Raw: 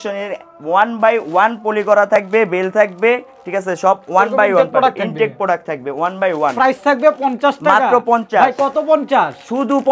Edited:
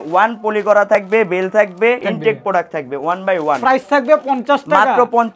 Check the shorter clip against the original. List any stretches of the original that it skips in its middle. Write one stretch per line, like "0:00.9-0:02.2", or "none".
0:03.2-0:05.0